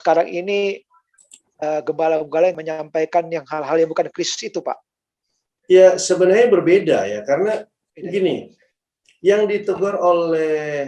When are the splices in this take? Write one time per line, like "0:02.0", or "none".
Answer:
0:02.6